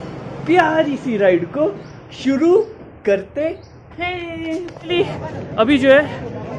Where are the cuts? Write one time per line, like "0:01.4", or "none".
0:04.9